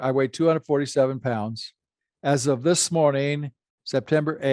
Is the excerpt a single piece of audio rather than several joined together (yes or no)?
yes